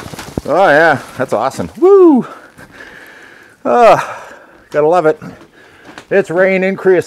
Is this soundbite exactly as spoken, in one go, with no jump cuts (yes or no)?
yes